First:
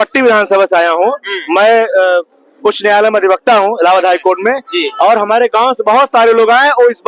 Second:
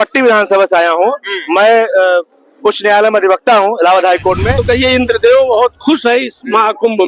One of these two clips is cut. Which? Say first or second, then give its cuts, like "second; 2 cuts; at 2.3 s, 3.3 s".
second; 1 cut; at 4.6 s